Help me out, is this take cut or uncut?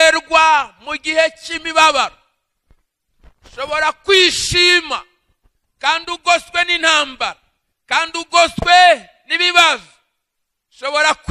uncut